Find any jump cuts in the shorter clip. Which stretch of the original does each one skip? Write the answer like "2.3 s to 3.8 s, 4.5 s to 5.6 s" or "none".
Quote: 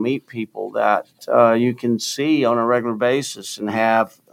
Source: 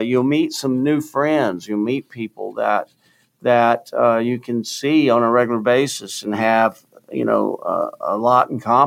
3.0 s to 3.9 s